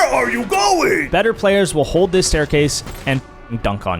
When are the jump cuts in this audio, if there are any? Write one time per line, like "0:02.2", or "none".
0:01.1